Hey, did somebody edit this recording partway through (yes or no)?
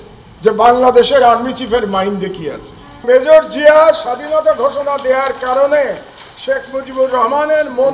yes